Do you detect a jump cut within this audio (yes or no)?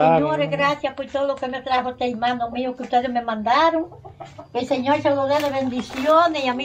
no